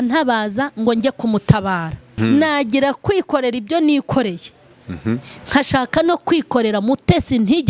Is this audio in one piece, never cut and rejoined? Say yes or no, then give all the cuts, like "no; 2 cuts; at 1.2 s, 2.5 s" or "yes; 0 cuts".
no; 1 cut; at 2.0 s